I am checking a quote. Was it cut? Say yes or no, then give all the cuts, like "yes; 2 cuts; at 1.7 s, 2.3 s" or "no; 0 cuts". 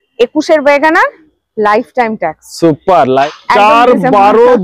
yes; 1 cut; at 3.2 s